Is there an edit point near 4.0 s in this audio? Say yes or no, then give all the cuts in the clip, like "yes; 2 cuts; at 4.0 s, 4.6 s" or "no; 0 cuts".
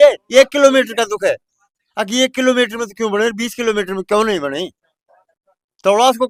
no; 0 cuts